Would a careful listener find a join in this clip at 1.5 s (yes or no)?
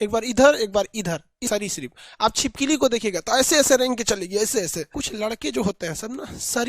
yes